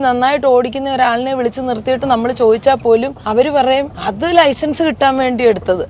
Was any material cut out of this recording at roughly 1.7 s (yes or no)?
no